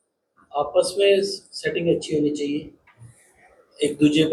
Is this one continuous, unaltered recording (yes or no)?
yes